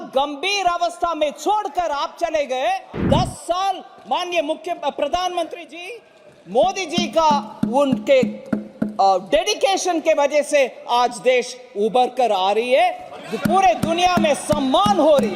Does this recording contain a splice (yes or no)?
yes